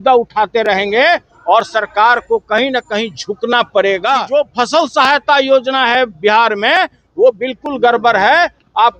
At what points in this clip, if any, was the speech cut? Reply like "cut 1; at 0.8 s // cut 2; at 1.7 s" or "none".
cut 1; at 4.2 s